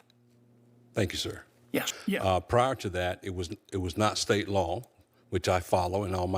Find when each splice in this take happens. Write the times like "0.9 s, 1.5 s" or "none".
1.9 s